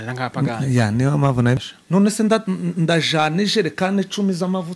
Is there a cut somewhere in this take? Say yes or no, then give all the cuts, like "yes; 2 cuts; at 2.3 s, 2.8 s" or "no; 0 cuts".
yes; 1 cut; at 1.6 s